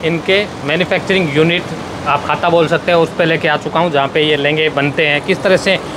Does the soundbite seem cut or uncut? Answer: uncut